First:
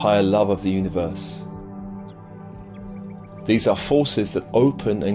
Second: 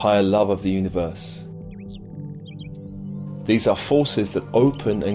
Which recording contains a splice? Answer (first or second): first